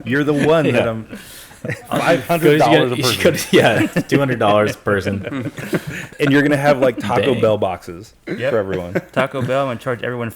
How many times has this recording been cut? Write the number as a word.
one